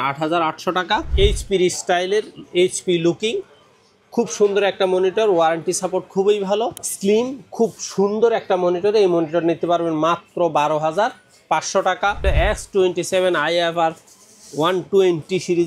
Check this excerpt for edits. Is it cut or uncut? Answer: cut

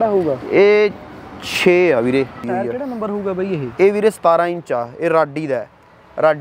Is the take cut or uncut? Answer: cut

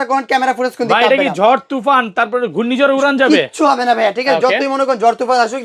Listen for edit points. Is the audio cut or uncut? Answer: uncut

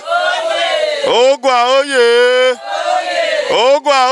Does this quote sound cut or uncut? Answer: uncut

